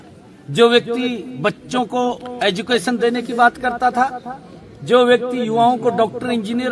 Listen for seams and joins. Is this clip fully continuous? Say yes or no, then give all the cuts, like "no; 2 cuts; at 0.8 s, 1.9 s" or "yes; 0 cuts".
yes; 0 cuts